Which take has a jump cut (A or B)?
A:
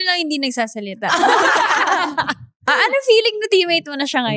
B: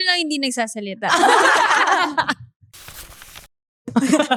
A